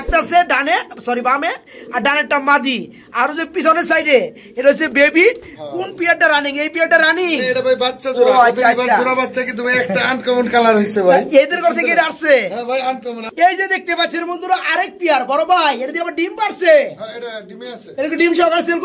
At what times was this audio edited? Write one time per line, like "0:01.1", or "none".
0:05.5
0:13.2